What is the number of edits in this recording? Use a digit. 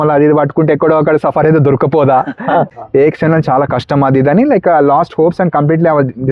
1